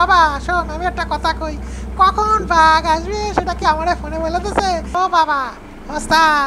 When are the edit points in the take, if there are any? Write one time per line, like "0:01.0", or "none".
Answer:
0:04.9